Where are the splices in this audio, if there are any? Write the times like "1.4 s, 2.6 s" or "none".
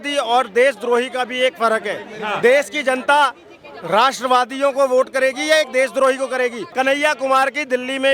6.6 s